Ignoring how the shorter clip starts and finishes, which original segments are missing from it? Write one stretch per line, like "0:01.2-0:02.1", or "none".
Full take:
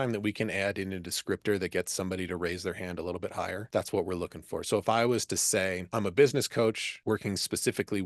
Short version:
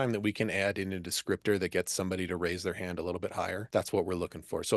none